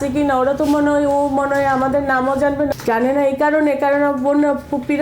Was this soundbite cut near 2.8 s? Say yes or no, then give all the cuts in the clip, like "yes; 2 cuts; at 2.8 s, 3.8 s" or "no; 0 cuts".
yes; 1 cut; at 2.8 s